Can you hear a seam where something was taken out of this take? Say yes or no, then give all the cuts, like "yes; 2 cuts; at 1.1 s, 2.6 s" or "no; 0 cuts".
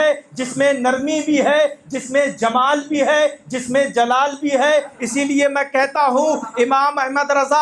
no; 0 cuts